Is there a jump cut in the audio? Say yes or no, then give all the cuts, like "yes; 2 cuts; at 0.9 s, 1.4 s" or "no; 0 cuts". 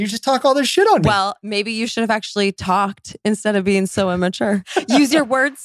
yes; 1 cut; at 4.7 s